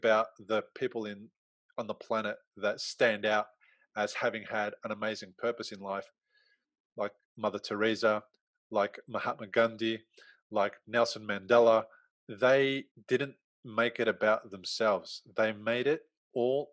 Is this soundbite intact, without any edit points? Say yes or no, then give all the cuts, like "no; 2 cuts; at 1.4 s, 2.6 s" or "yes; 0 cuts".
no; 2 cuts; at 12.0 s, 12.9 s